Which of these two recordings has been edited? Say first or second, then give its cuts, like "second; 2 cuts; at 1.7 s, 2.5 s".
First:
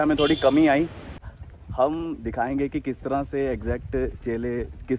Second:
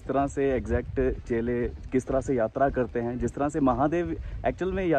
first; 1 cut; at 1.2 s